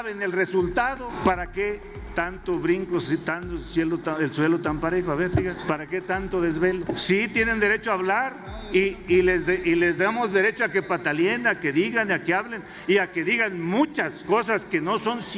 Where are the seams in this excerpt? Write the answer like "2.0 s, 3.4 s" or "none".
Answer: 1.1 s, 5.6 s, 7.0 s

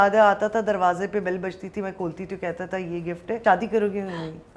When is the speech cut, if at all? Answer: 3.4 s

